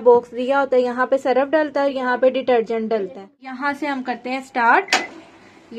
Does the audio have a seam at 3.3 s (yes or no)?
yes